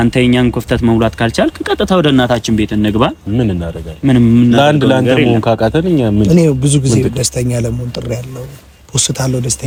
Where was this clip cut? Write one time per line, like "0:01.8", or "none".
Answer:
none